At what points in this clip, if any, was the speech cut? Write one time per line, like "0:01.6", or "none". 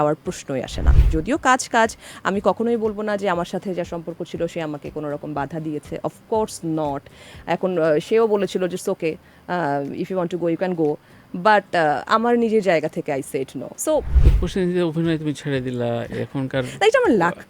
0:01.0
0:14.1